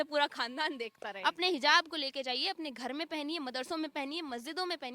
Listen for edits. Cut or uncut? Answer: cut